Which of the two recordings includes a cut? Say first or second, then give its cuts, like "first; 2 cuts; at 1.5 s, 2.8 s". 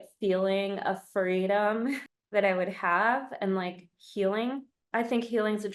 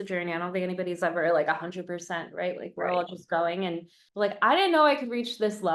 first; 1 cut; at 4.7 s